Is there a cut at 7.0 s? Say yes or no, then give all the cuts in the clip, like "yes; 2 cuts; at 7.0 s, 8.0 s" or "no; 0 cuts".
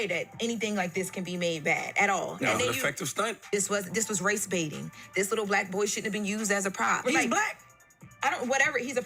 yes; 2 cuts; at 3.4 s, 7.0 s